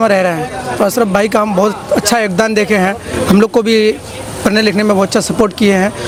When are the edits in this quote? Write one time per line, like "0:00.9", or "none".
none